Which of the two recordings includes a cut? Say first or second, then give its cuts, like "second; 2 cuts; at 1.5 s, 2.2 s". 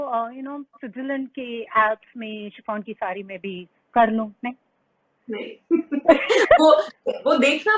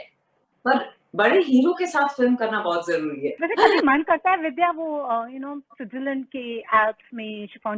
second; 1 cut; at 3.4 s